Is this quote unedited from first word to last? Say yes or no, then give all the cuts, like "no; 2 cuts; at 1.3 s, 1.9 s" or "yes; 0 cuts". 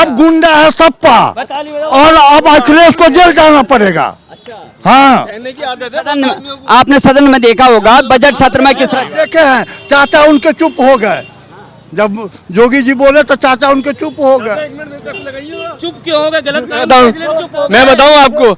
yes; 0 cuts